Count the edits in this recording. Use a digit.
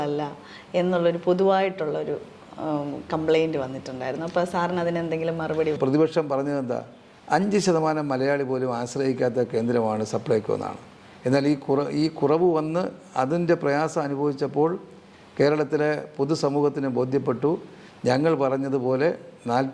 1